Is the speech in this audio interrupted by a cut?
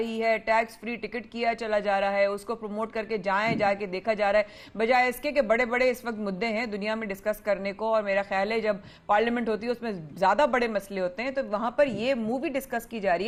no; 0 cuts

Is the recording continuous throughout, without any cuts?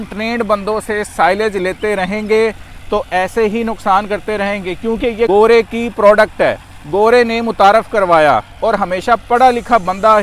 no; 1 cut; at 5.3 s

